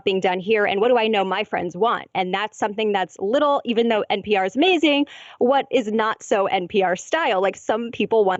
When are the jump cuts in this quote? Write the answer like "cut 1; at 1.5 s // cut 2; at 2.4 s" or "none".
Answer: none